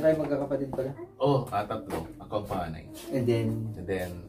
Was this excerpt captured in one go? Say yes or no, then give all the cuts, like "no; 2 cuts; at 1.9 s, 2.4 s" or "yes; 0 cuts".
yes; 0 cuts